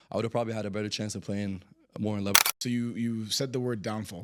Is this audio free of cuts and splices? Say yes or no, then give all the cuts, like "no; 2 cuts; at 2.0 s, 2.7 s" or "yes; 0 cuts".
no; 1 cut; at 2.5 s